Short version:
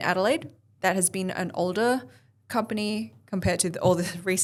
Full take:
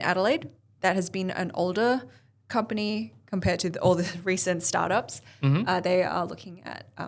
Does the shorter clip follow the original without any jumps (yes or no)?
yes